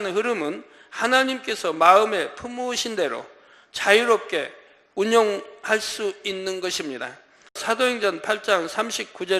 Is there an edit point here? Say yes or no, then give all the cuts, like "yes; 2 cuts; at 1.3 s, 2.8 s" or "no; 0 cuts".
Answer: yes; 1 cut; at 7.6 s